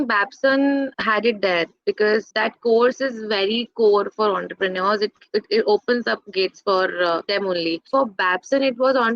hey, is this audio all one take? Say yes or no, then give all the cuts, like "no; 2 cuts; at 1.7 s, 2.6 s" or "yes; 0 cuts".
no; 3 cuts; at 0.9 s, 2.3 s, 7.7 s